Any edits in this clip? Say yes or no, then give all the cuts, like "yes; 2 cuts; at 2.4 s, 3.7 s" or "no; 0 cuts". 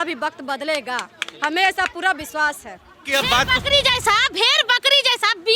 yes; 1 cut; at 3.0 s